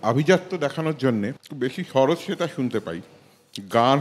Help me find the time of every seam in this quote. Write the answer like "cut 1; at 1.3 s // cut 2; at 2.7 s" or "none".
cut 1; at 1.4 s